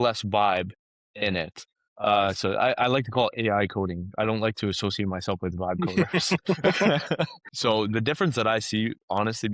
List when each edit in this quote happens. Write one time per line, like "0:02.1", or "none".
0:07.4